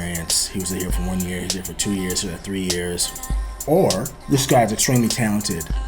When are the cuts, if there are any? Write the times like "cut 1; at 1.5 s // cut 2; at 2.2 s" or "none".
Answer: cut 1; at 3.5 s // cut 2; at 4.2 s